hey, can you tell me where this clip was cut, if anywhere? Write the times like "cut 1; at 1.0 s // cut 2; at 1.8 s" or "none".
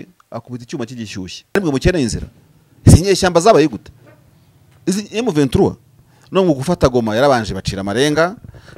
cut 1; at 1.6 s